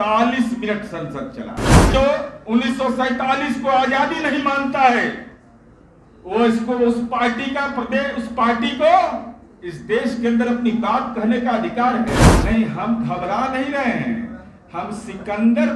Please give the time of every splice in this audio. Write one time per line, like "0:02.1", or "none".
0:01.9
0:12.4